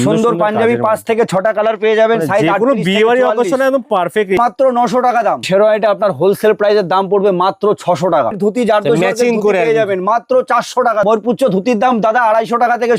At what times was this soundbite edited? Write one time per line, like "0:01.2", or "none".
0:04.4
0:05.5
0:08.4
0:11.0